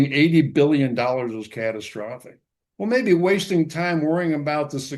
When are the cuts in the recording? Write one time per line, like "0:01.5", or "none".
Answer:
none